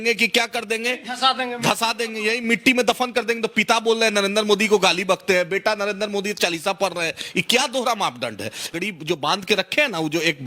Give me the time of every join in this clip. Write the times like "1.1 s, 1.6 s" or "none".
8.7 s